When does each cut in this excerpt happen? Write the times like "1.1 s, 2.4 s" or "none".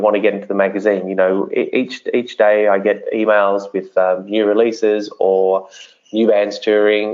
none